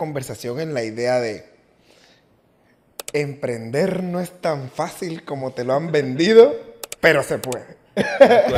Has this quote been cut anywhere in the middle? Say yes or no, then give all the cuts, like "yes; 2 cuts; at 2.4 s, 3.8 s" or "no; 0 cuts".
no; 0 cuts